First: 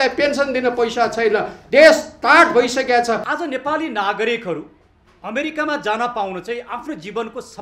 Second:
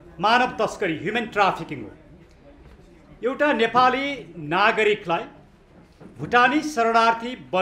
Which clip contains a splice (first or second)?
first